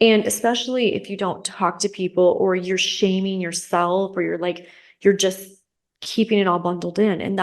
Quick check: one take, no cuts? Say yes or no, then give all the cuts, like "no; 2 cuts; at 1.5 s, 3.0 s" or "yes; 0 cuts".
yes; 0 cuts